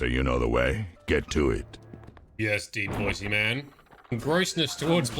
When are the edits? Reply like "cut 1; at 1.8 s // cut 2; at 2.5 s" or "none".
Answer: cut 1; at 4.2 s